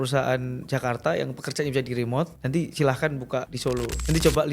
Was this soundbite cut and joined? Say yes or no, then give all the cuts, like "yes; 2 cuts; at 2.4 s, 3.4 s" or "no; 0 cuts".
yes; 2 cuts; at 2.4 s, 3.7 s